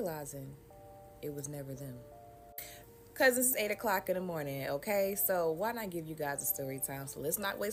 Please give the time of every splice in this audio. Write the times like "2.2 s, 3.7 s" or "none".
none